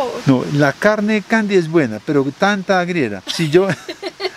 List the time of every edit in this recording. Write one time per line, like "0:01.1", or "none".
none